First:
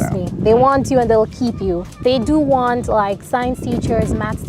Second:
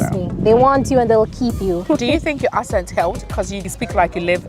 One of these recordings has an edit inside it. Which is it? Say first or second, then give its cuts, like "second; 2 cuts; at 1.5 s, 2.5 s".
second; 2 cuts; at 1.8 s, 3.5 s